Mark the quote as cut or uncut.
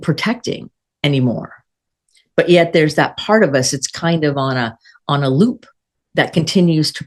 uncut